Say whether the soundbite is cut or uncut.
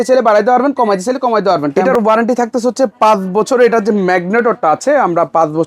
cut